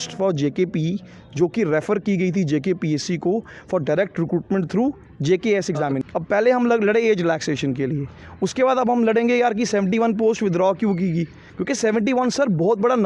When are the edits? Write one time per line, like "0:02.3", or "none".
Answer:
0:06.0